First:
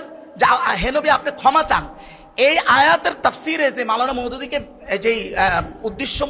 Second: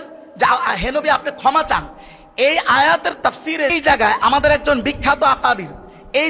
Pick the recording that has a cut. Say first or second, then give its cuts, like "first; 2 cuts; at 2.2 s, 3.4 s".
second; 1 cut; at 3.7 s